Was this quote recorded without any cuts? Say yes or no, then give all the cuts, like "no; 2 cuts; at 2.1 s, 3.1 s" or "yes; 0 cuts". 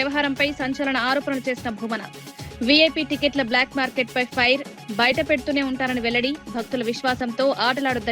yes; 0 cuts